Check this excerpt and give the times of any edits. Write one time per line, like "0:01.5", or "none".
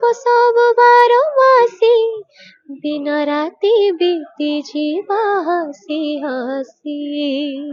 none

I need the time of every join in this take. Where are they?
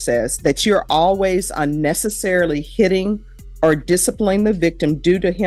none

